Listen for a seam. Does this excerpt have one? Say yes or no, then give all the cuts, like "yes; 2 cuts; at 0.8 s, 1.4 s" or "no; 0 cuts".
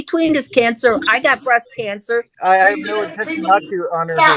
yes; 1 cut; at 2.3 s